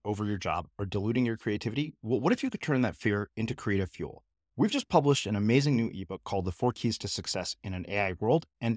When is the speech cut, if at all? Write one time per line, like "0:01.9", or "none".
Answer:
none